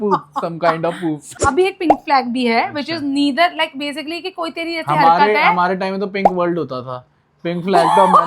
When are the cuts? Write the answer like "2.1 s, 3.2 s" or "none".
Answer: 1.3 s